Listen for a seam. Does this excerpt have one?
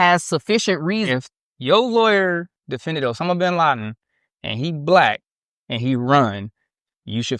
yes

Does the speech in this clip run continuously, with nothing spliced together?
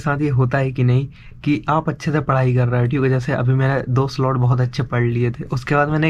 yes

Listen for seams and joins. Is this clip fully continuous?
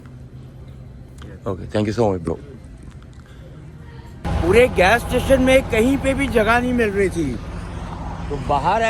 no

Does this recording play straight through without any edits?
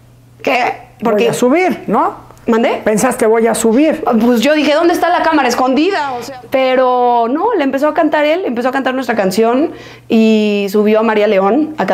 no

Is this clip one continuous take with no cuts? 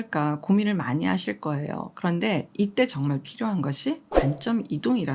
yes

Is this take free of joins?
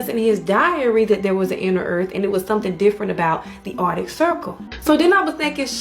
no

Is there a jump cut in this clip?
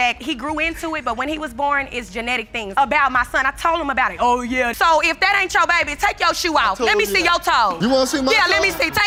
no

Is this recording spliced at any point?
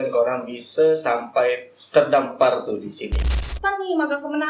yes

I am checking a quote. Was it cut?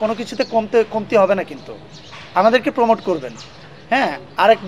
no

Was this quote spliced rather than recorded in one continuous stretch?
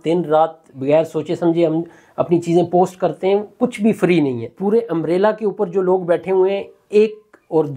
yes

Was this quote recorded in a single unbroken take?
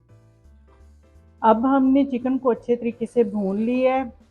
no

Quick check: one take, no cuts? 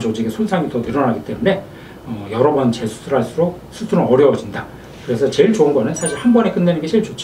yes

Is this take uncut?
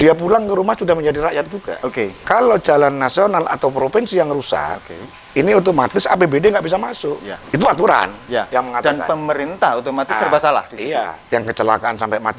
no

